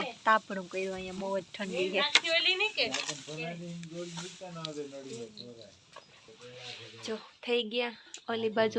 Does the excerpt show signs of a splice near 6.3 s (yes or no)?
yes